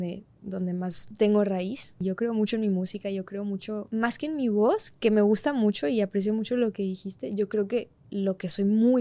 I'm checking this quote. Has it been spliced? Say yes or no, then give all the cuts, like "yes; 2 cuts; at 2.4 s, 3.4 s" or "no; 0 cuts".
yes; 3 cuts; at 1.0 s, 1.9 s, 3.8 s